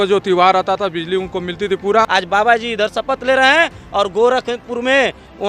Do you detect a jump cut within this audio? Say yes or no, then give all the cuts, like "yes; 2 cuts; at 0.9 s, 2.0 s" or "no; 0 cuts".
yes; 1 cut; at 2.1 s